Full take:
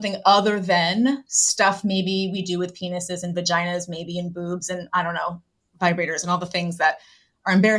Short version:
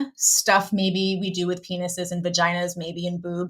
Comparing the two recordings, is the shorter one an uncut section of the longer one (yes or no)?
yes